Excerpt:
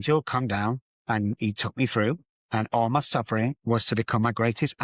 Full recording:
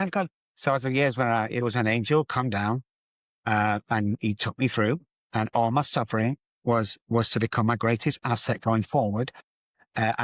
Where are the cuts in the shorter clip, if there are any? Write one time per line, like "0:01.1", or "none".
0:01.0
0:03.6